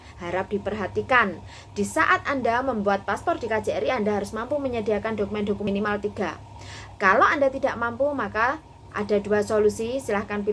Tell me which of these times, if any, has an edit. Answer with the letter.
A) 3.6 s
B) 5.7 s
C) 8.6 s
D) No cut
B